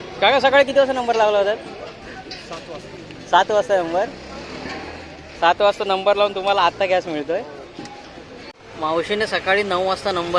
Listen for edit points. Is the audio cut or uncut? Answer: cut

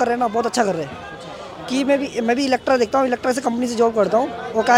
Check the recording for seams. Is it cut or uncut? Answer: uncut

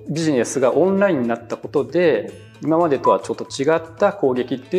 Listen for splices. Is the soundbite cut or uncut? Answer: uncut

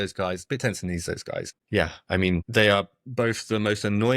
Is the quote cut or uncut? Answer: cut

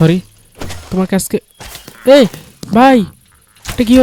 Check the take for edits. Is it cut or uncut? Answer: uncut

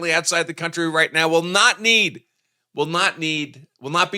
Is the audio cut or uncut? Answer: uncut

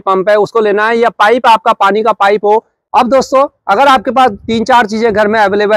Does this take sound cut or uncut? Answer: cut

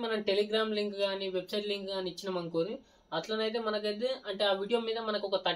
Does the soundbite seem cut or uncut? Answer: uncut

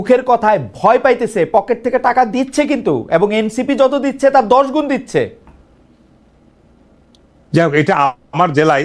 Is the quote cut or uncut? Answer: uncut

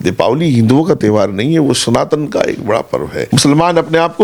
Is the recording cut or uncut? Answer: cut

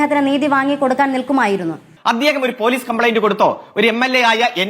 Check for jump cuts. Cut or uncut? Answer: cut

